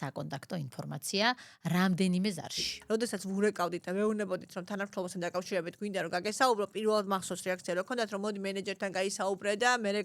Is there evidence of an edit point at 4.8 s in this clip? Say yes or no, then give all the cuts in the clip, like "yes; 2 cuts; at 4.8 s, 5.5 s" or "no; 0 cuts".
no; 1 cut; at 2.7 s